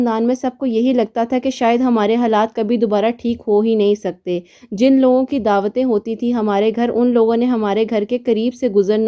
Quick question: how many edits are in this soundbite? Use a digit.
0